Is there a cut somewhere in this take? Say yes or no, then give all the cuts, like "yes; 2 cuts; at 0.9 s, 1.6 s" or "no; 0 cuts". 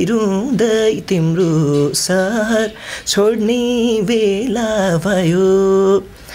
no; 0 cuts